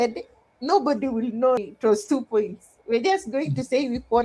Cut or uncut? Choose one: cut